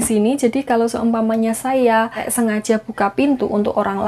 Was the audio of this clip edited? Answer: yes; 1 cut; at 2.2 s

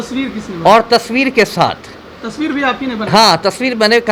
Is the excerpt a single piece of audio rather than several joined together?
yes; 0 cuts

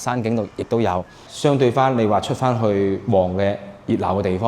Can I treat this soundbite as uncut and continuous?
no; 1 cut; at 1.2 s

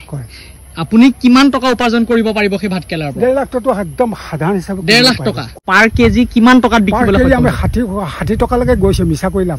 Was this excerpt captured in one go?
no; 1 cut; at 5.5 s

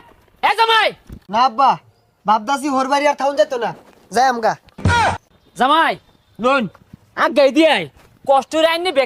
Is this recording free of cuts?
yes; 0 cuts

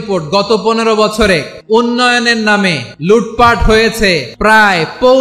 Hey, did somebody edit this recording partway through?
yes; 3 cuts; at 1.5 s, 2.9 s, 4.3 s

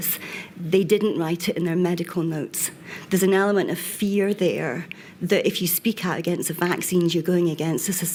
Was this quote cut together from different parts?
no; 0 cuts

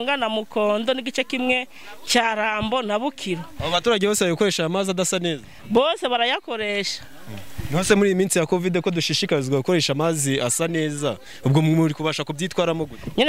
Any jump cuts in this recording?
no; 0 cuts

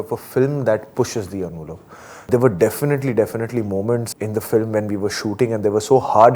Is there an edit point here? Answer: yes; 2 cuts; at 2.3 s, 4.1 s

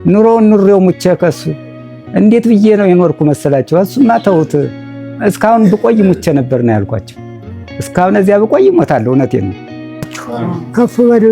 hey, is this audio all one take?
no; 1 cut; at 10.1 s

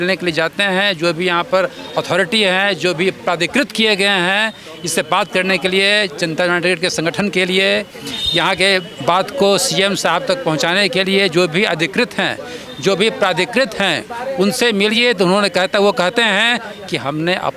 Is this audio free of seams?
yes; 0 cuts

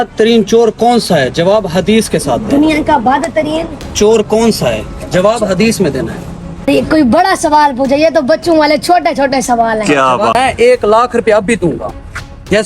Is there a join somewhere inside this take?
yes; 2 cuts; at 6.7 s, 10.3 s

